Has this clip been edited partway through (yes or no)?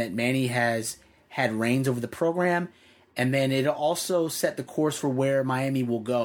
no